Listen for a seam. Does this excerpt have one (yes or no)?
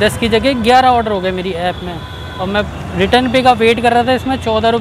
no